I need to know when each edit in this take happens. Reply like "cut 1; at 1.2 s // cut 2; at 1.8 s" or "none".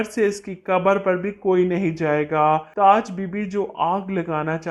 none